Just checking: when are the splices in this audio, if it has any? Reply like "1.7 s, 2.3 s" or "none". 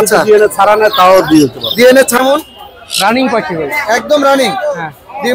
2.2 s